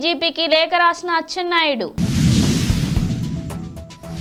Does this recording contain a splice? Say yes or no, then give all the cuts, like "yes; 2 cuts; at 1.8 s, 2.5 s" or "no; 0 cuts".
no; 0 cuts